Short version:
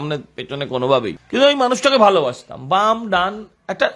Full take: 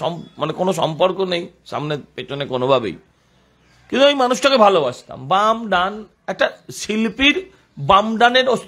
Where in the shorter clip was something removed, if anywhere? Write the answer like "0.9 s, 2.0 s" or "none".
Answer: 1.2 s

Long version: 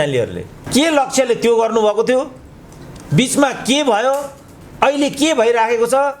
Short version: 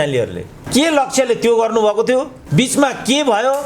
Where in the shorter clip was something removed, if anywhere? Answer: 2.4 s

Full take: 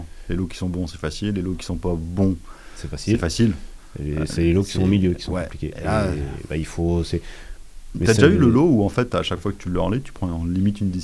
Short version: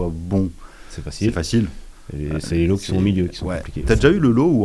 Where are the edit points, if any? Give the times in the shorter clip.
3.7 s

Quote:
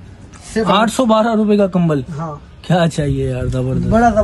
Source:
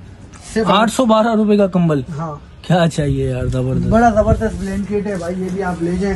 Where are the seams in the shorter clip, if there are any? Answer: none

